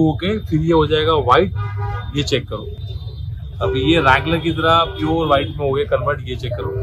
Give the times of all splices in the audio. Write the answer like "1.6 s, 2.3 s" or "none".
none